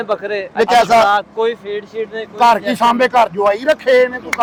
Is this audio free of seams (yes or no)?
yes